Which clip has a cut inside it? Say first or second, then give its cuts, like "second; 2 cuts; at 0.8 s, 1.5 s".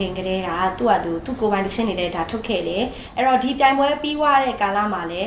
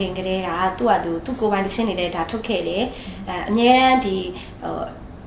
first; 1 cut; at 3.0 s